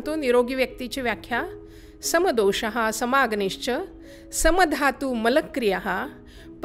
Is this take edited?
no; 0 cuts

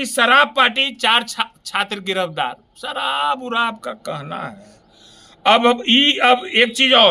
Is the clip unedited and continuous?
yes; 0 cuts

